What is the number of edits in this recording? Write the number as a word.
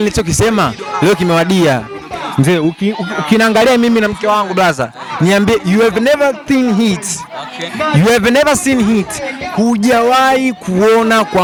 zero